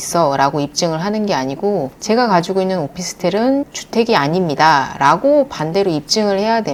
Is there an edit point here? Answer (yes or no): no